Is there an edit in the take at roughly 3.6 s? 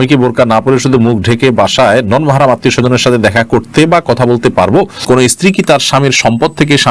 no; 1 cut; at 5.3 s

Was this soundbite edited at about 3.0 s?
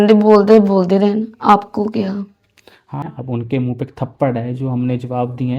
yes; 1 cut; at 3.0 s

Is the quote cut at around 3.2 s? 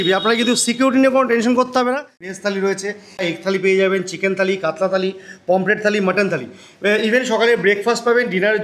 yes; 2 cuts; at 2.3 s, 3.2 s

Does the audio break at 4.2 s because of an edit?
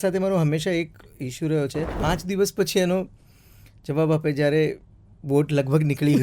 no; 1 cut; at 1.9 s

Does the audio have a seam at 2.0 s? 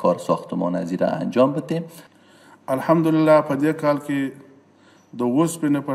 yes; 1 cut; at 2.0 s

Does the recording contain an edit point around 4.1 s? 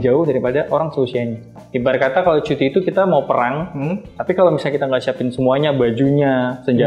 no; 1 cut; at 1.5 s

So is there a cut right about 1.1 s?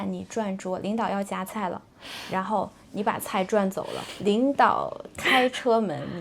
no; 1 cut; at 4.0 s

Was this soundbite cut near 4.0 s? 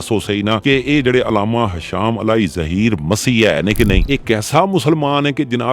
yes; 1 cut; at 4.0 s

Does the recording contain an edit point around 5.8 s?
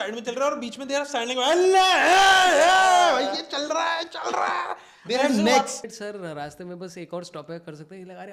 yes; 1 cut; at 5.8 s

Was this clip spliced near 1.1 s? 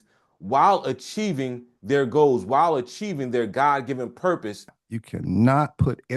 no; 1 cut; at 4.7 s

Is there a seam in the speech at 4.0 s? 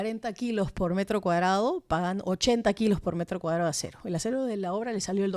no; 0 cuts

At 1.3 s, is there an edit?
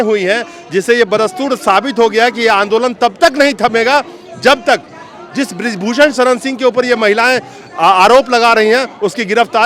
no; 0 cuts

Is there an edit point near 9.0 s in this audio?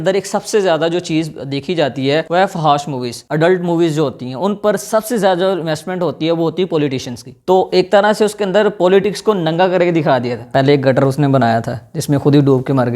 no; 3 cuts; at 2.3 s, 7.4 s, 10.4 s

